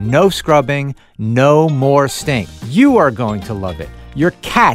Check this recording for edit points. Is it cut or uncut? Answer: cut